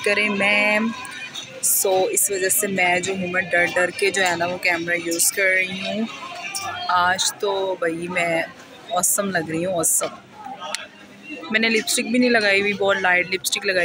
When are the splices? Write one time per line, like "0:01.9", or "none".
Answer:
none

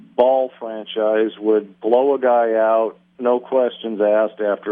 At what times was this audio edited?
0:03.0

